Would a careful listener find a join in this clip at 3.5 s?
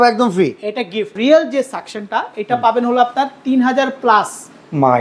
no; 1 cut; at 1.1 s

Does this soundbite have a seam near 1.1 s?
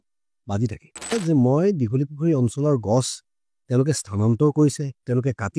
yes; 1 cut; at 1.1 s

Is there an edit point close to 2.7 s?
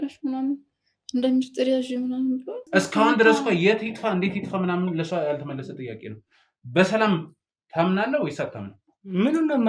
yes; 1 cut; at 2.7 s

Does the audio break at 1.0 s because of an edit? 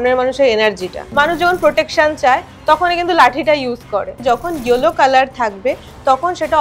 yes; 2 cuts; at 1.0 s, 4.2 s

